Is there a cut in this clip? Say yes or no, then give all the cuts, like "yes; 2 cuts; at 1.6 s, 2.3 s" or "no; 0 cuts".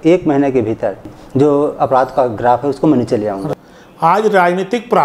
yes; 2 cuts; at 1.0 s, 3.4 s